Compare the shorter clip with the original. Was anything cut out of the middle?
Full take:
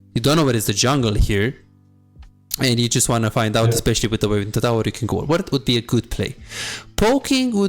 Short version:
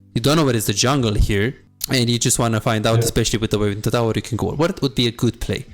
yes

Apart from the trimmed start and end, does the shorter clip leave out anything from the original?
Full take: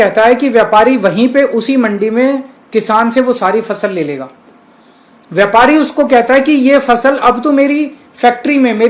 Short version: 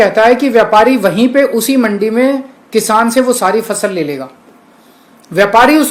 no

